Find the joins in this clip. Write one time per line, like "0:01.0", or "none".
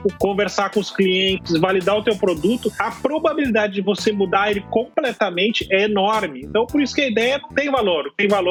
none